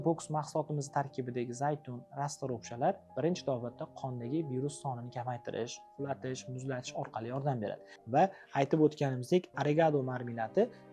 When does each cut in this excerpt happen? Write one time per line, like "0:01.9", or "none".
0:07.9